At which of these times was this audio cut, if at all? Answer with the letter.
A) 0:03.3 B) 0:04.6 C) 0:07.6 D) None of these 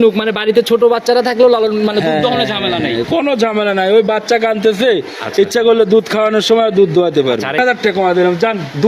C